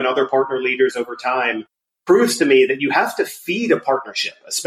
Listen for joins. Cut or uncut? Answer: uncut